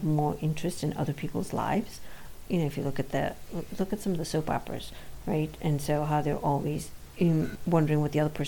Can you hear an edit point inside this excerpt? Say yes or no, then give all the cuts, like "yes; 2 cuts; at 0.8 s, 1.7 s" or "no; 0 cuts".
yes; 2 cuts; at 2.3 s, 7.5 s